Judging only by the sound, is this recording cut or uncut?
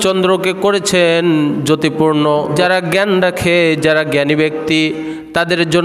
cut